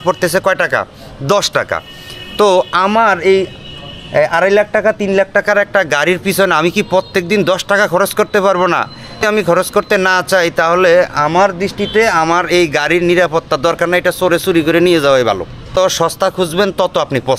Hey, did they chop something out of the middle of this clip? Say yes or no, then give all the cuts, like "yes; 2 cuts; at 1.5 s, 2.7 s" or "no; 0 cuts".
yes; 2 cuts; at 9.2 s, 15.7 s